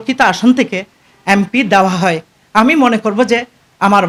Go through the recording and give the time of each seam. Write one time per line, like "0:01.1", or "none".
none